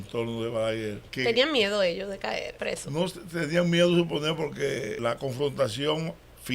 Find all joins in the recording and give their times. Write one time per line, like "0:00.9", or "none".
0:01.0
0:02.5
0:05.0